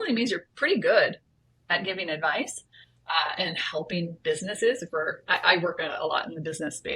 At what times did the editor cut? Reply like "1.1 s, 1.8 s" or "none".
none